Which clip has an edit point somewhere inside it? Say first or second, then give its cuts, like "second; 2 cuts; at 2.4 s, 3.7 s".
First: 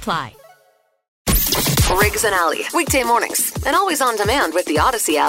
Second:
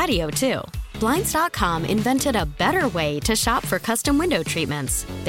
first; 1 cut; at 1.1 s